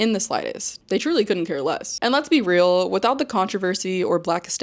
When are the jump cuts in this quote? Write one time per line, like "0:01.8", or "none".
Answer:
0:01.9

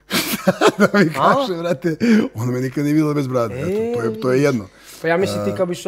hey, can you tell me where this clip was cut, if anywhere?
none

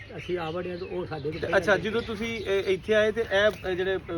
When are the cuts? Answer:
0:01.4

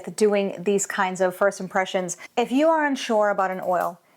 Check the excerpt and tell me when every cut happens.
0:02.2

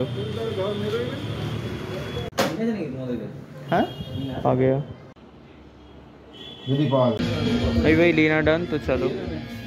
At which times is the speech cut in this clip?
0:02.3

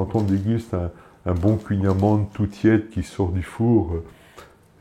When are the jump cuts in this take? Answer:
none

